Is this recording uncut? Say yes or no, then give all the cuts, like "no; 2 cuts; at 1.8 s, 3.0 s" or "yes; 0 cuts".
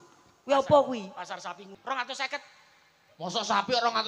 no; 1 cut; at 1.7 s